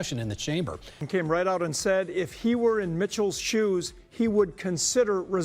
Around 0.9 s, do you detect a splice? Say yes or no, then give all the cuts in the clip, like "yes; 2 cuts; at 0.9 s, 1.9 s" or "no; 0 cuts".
yes; 1 cut; at 0.9 s